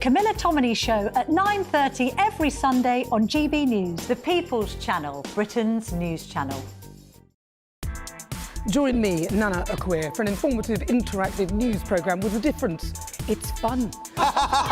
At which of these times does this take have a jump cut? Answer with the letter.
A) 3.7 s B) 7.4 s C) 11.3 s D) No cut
B